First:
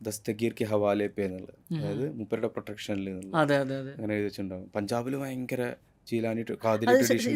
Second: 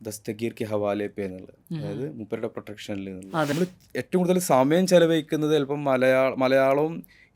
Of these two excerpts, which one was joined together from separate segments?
second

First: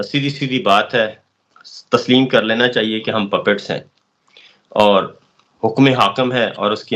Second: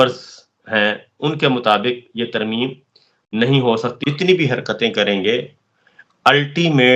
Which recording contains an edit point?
second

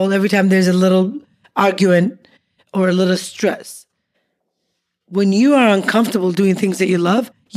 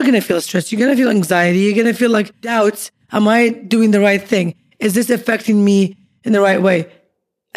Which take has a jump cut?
second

